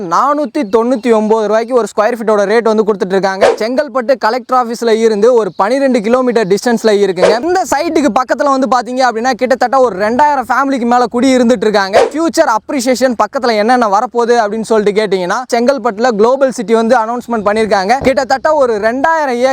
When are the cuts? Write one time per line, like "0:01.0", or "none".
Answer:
0:03.5
0:07.5
0:12.1
0:15.5